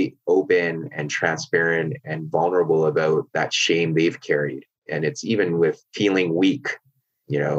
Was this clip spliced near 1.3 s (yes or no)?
no